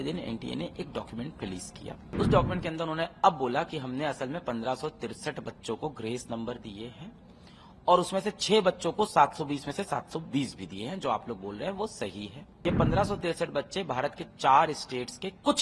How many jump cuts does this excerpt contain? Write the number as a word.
two